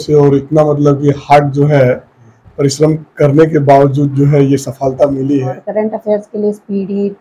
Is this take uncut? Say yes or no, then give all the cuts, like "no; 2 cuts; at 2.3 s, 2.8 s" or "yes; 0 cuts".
no; 1 cut; at 5.6 s